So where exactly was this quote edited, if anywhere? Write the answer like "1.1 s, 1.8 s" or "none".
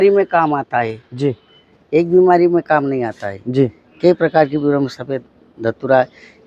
none